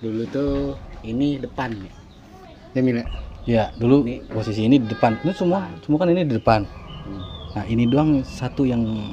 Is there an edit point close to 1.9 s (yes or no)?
no